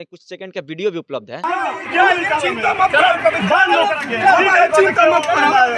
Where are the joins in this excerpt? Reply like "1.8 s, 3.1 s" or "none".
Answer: 1.3 s